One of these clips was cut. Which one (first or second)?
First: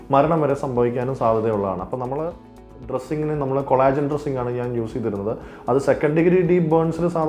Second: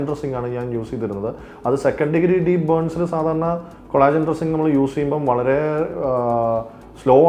first